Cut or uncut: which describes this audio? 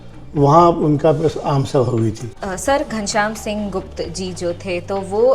cut